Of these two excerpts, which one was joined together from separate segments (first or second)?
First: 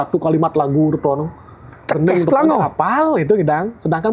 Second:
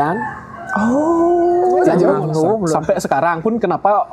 second